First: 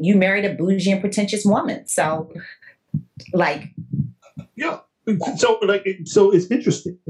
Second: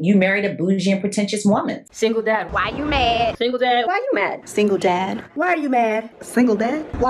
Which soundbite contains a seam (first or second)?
second